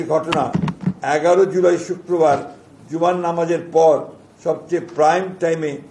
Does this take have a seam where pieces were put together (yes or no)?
no